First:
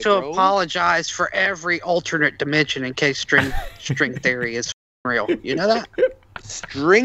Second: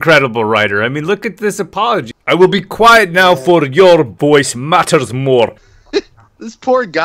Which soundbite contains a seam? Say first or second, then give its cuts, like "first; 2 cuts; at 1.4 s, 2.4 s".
second; 2 cuts; at 2.1 s, 5.7 s